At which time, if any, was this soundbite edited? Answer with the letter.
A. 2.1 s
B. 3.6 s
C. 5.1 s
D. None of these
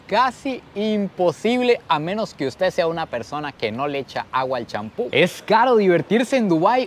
C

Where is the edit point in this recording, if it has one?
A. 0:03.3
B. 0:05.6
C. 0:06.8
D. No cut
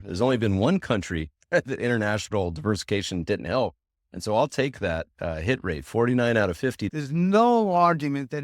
C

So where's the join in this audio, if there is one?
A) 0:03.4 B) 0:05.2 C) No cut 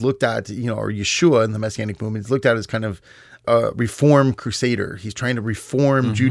A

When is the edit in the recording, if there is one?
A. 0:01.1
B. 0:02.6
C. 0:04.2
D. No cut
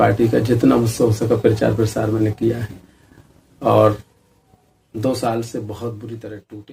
D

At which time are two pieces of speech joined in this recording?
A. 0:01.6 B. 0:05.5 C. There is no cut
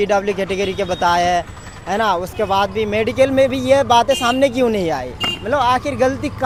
C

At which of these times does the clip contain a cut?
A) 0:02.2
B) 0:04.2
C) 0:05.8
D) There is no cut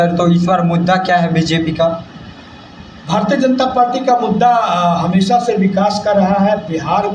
D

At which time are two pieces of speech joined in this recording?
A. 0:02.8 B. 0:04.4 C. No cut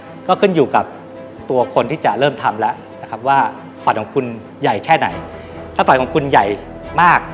B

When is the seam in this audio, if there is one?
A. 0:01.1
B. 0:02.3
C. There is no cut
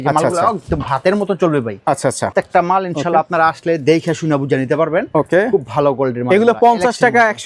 B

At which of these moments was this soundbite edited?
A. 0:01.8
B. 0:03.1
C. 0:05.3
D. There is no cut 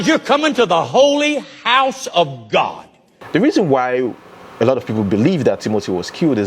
B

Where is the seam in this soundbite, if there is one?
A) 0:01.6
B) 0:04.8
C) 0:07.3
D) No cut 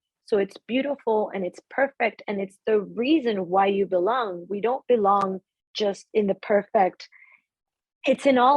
C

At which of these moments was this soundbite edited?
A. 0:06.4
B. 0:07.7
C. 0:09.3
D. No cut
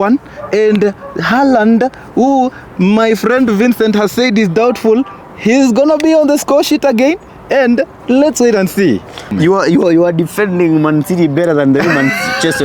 C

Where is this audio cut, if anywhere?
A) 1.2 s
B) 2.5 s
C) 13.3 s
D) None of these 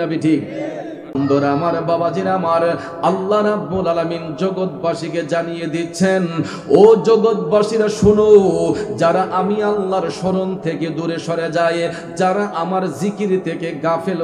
A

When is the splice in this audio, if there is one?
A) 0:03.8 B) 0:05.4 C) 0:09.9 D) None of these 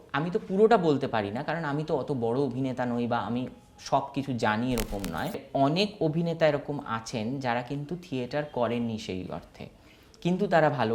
B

